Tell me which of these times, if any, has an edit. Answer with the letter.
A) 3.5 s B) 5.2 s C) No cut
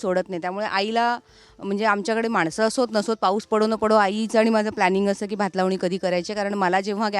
C